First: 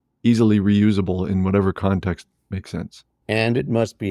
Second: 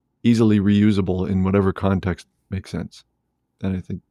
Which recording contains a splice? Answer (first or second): first